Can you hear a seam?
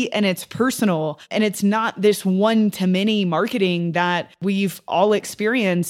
yes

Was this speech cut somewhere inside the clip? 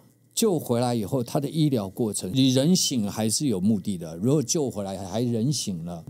no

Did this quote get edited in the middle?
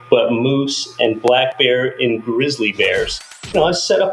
yes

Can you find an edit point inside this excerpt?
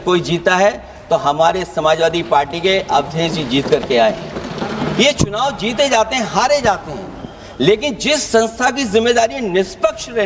no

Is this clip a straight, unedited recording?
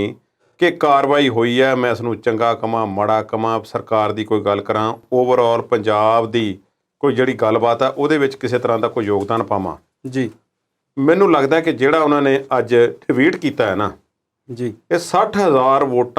yes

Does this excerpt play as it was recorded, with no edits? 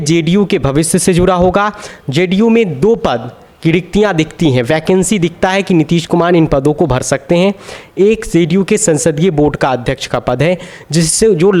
yes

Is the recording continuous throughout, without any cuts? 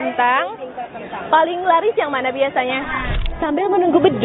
no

